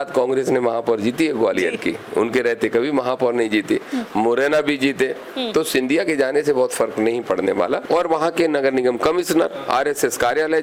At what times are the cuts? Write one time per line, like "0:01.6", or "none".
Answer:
0:07.8